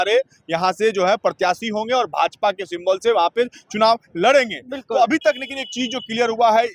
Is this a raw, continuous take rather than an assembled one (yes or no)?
yes